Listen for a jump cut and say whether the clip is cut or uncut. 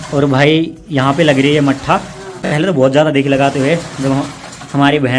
cut